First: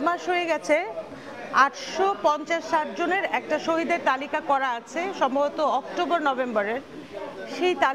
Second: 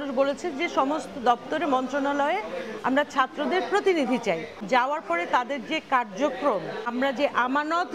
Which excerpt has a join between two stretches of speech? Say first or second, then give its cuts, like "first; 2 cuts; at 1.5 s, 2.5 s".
second; 2 cuts; at 4.6 s, 6.9 s